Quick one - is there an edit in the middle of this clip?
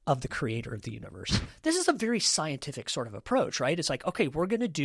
yes; 1 cut; at 1.5 s

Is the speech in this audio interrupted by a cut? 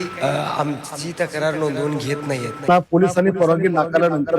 yes; 1 cut; at 2.5 s

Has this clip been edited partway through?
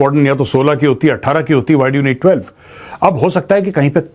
no; 0 cuts

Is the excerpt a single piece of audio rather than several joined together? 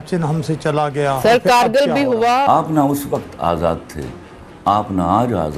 no; 2 cuts; at 1.2 s, 2.4 s

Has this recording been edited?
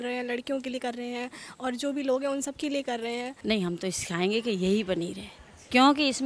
yes; 1 cut; at 3.3 s

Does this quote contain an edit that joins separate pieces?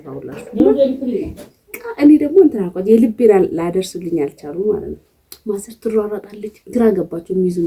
yes; 1 cut; at 1.3 s

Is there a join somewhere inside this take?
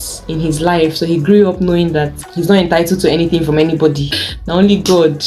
yes; 1 cut; at 4.2 s

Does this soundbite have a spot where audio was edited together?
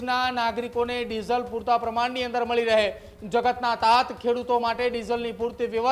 no; 0 cuts

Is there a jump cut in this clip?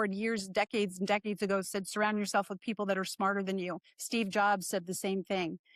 no; 0 cuts

